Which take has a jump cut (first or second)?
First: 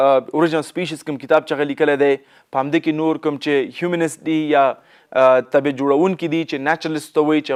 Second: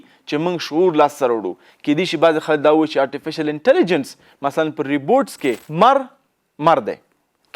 second